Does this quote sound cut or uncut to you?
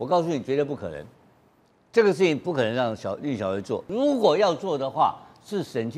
cut